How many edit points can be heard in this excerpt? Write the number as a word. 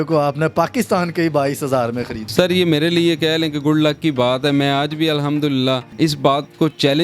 two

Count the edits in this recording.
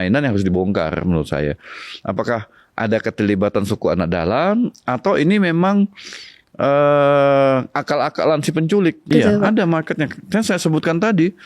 one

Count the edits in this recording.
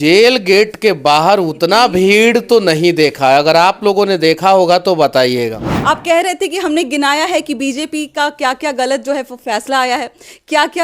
one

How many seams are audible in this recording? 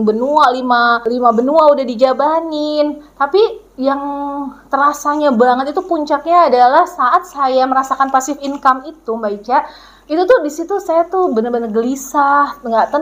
one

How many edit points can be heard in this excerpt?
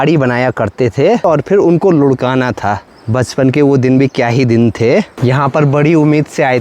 three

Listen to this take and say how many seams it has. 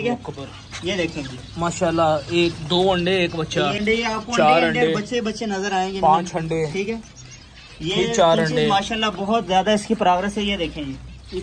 one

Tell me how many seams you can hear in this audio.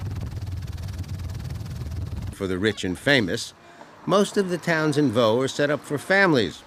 zero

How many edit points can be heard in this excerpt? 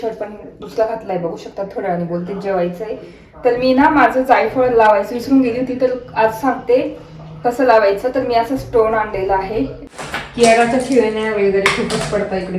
one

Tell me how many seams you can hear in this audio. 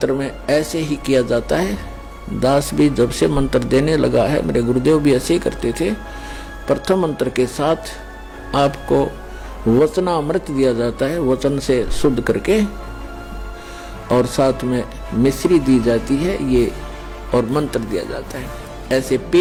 zero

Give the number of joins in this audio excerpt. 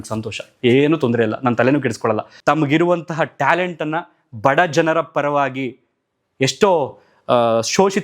one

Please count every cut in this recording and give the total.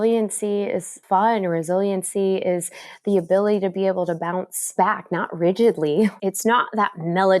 three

